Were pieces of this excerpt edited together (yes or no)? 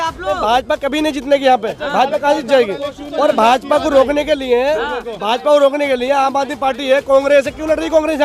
no